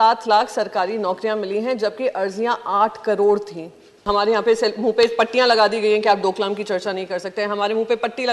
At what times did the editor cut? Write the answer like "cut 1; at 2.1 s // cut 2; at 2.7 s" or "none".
cut 1; at 4.0 s